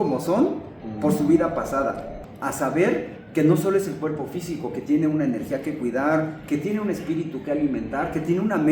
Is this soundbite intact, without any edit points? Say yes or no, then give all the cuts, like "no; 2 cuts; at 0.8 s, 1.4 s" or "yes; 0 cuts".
no; 1 cut; at 2.1 s